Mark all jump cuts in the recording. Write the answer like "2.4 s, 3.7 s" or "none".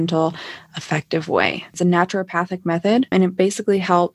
1.8 s, 3.1 s